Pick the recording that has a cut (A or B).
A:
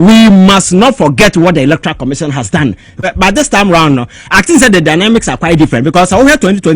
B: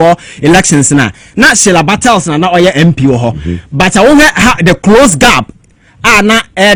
A